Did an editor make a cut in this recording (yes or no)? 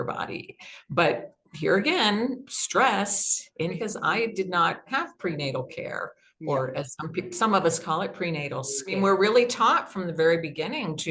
yes